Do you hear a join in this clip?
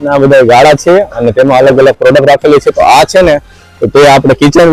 no; 0 cuts

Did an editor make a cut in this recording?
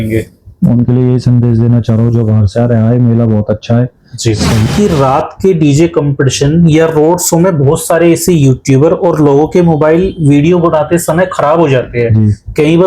yes; 1 cut; at 4.7 s

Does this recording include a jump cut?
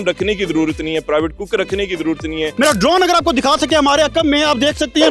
yes; 1 cut; at 2.6 s

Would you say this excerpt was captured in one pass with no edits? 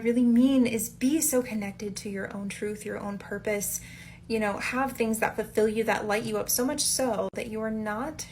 no; 1 cut; at 6.0 s

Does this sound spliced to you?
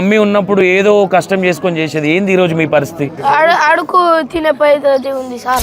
yes; 1 cut; at 3.1 s

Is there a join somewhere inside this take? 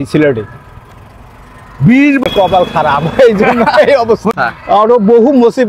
yes; 2 cuts; at 2.3 s, 4.3 s

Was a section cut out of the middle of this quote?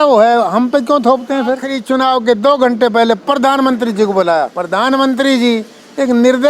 yes; 2 cuts; at 1.7 s, 4.6 s

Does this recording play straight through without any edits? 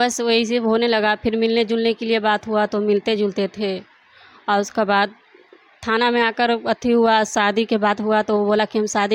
yes; 0 cuts

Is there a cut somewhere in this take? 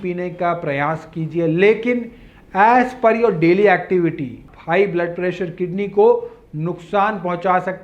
yes; 1 cut; at 4.5 s

